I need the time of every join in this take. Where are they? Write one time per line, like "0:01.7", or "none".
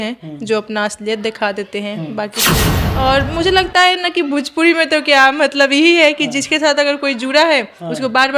0:02.7